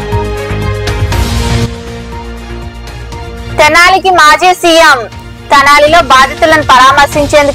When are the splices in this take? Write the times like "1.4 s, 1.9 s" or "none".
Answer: 1.0 s